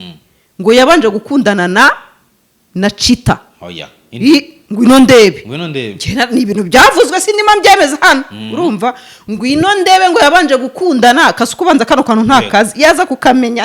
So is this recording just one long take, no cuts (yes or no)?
yes